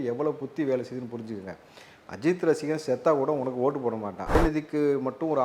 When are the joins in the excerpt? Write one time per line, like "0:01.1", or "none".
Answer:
0:04.4